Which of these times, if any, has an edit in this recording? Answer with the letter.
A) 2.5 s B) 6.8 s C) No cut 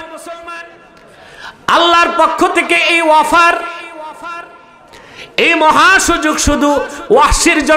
C